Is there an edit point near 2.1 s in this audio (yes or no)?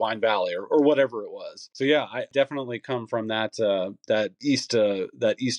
yes